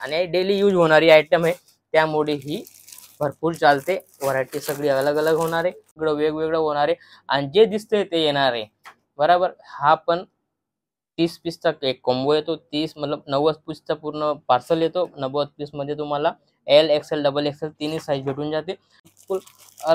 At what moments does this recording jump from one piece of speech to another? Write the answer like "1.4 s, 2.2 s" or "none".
5.9 s, 18.9 s